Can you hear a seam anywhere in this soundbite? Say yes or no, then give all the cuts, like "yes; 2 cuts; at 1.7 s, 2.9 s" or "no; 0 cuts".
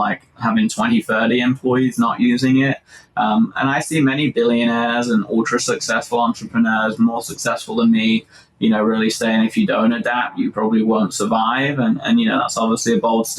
no; 0 cuts